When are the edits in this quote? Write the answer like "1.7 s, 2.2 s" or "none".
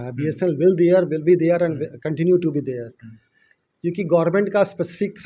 none